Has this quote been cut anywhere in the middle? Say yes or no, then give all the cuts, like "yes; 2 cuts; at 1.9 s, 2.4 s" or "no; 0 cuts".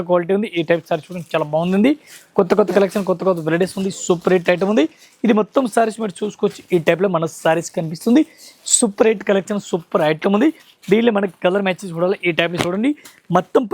no; 0 cuts